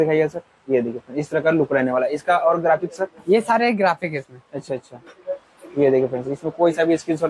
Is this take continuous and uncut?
yes; 0 cuts

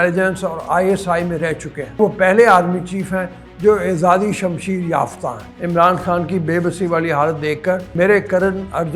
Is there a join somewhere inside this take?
yes; 3 cuts; at 2.0 s, 5.5 s, 7.9 s

